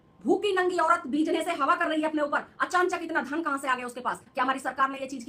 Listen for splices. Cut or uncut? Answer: uncut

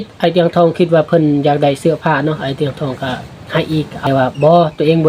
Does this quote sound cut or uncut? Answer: cut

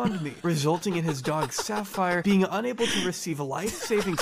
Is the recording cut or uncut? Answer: uncut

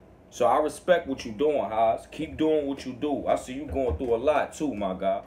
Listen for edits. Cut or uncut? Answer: uncut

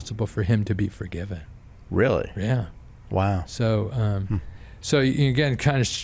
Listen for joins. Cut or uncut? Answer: uncut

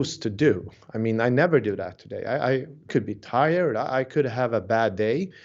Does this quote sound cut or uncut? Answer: cut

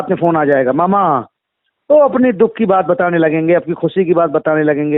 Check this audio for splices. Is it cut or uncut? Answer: uncut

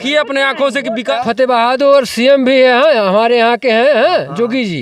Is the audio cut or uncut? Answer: cut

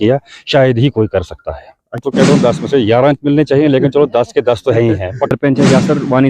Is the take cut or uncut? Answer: cut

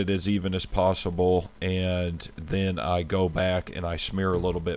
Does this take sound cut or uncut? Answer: uncut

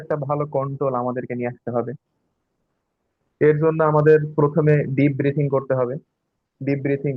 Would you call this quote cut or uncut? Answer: uncut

